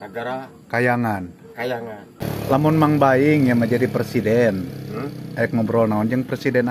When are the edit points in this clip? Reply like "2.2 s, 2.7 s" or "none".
2.0 s

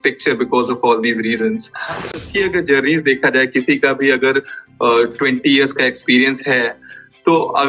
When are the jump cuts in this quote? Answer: 2.2 s, 6.7 s

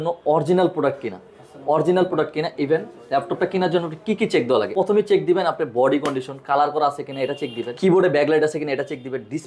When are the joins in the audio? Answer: 4.7 s, 7.6 s

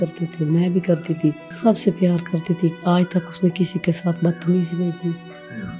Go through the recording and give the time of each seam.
1.5 s

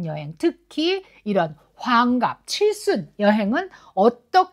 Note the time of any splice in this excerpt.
none

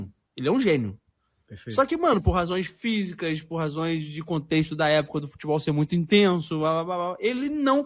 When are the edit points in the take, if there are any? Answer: none

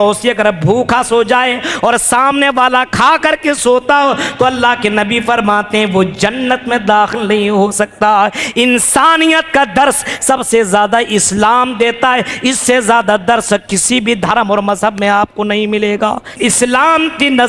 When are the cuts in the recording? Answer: 16.5 s

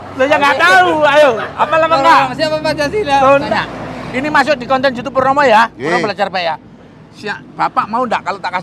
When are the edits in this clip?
3.5 s

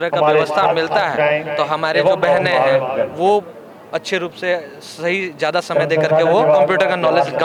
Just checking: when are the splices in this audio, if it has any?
none

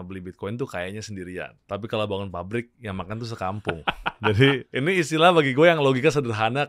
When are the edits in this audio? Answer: 1.6 s, 4.7 s

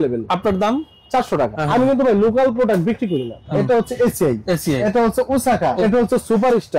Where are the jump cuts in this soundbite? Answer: 1.6 s, 3.4 s, 4.8 s, 5.8 s

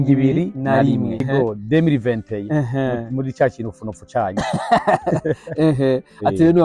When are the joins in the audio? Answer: 1.3 s

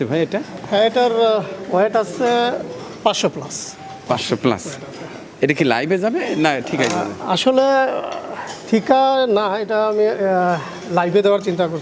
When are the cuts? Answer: none

